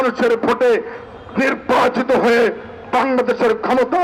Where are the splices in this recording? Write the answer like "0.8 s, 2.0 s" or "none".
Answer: none